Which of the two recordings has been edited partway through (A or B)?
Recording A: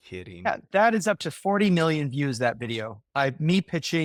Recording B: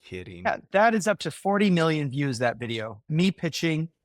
B